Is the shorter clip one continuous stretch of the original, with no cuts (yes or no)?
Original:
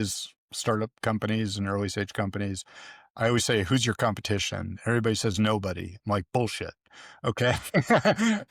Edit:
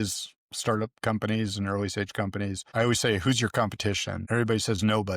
no